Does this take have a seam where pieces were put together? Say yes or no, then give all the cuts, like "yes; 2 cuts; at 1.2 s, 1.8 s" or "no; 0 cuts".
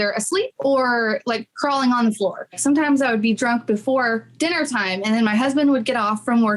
yes; 1 cut; at 2.5 s